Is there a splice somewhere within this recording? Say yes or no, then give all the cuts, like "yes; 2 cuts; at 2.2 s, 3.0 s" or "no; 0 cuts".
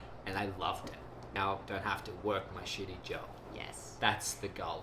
yes; 1 cut; at 1.3 s